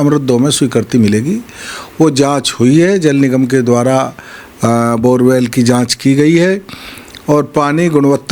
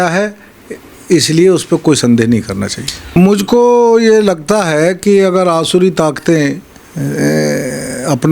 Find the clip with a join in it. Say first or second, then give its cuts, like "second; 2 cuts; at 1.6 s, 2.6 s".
second; 1 cut; at 3.1 s